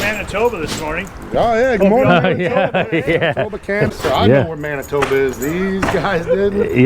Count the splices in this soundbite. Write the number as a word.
one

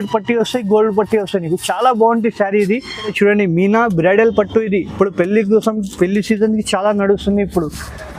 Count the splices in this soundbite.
one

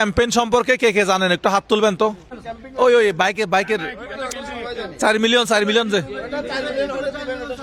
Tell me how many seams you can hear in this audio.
zero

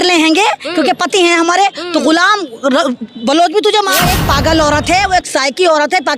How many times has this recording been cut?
one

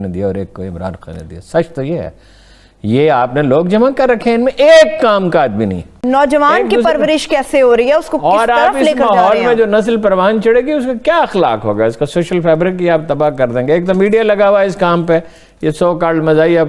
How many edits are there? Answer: one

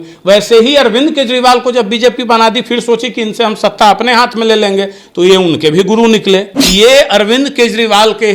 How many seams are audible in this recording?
one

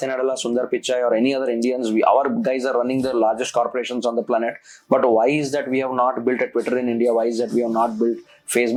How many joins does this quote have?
zero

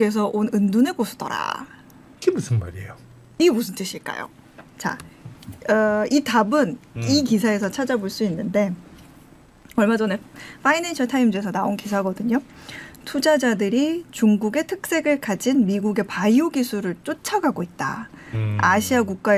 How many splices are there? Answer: zero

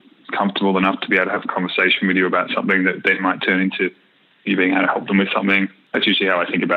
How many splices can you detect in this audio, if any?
one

